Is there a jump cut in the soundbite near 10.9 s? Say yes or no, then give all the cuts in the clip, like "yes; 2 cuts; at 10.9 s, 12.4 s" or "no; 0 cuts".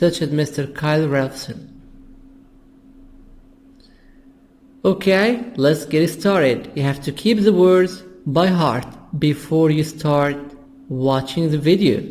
no; 1 cut; at 4.5 s